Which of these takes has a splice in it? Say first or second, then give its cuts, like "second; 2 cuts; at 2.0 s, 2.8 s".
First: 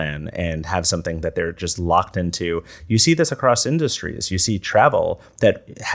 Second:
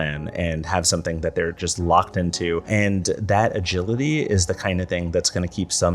second; 1 cut; at 2.6 s